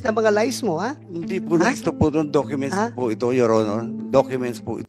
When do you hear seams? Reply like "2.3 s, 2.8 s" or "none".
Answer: none